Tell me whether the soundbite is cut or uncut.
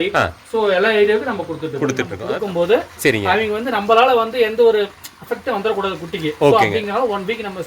cut